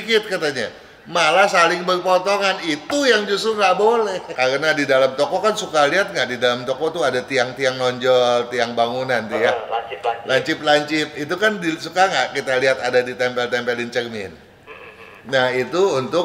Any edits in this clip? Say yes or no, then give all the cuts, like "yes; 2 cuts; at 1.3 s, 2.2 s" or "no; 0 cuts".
yes; 1 cut; at 4.2 s